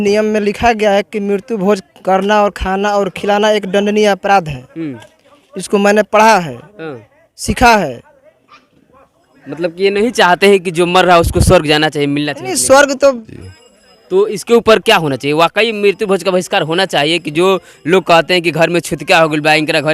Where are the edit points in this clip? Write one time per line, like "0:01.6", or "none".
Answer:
0:13.3